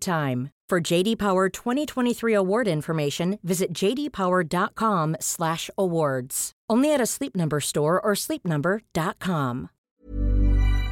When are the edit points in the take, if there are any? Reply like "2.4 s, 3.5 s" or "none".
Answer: 9.7 s